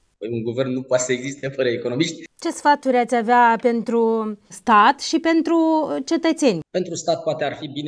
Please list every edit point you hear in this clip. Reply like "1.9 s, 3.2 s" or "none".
2.2 s, 6.6 s